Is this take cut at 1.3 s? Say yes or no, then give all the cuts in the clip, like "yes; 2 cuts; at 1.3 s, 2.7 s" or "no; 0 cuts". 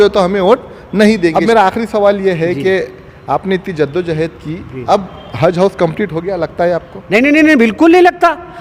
yes; 1 cut; at 1.3 s